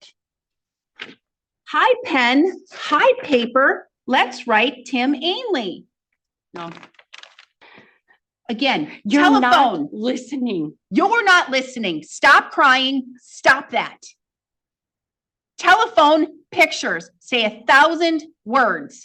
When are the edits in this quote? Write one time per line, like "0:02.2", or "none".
0:07.6